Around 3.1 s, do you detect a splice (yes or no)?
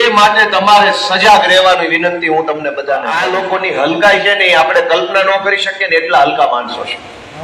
yes